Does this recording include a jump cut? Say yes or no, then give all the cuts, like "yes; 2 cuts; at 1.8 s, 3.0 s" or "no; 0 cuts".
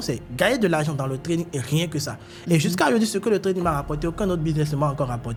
no; 0 cuts